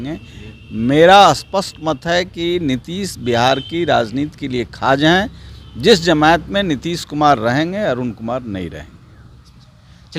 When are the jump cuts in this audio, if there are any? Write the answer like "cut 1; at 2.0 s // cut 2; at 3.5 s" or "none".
none